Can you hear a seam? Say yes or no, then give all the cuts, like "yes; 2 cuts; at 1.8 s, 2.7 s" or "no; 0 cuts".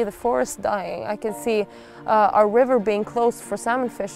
yes; 1 cut; at 1.0 s